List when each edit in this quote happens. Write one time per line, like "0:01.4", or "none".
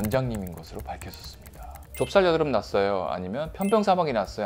0:01.8